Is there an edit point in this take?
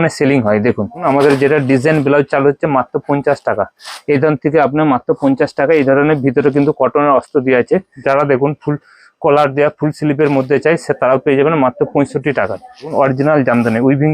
yes; 3 cuts; at 1.0 s, 7.9 s, 12.9 s

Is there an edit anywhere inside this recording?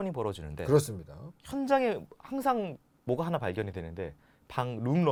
no; 0 cuts

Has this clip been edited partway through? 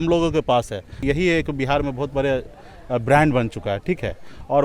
yes; 1 cut; at 1.0 s

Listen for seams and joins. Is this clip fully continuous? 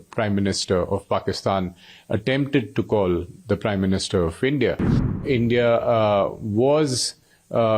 no; 1 cut; at 5.2 s

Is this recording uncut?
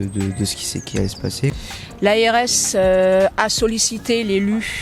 no; 1 cut; at 1.6 s

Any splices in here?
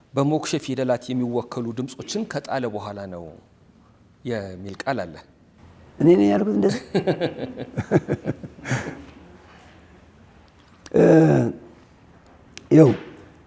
no; 0 cuts

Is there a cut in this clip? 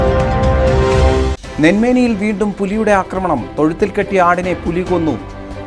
no; 0 cuts

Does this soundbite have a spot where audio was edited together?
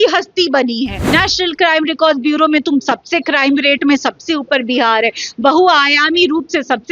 yes; 1 cut; at 1.0 s

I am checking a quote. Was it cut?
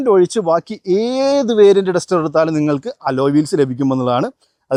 no; 0 cuts

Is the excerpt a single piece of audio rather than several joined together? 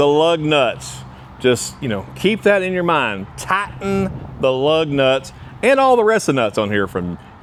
yes; 0 cuts

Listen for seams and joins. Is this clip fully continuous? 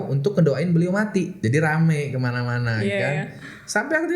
no; 1 cut; at 1.4 s

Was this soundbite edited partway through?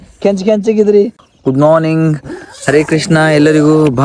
yes; 1 cut; at 1.3 s

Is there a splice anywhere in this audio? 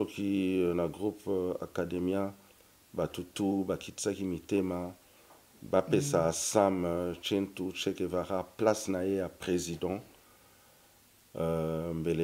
no; 0 cuts

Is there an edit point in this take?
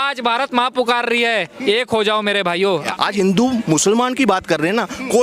yes; 1 cut; at 2.9 s

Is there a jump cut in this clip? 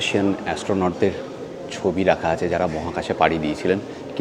no; 0 cuts

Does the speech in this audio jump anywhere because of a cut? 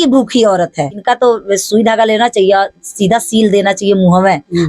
yes; 1 cut; at 1.0 s

